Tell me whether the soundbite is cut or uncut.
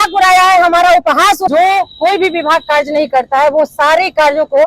cut